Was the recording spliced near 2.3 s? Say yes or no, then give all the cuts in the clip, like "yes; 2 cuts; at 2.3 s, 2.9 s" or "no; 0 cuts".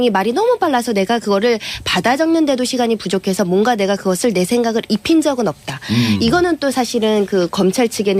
yes; 1 cut; at 2.3 s